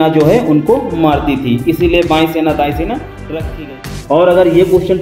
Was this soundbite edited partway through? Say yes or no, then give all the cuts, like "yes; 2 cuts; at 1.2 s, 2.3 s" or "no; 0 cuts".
yes; 1 cut; at 3.7 s